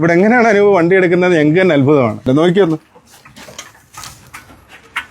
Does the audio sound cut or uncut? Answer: cut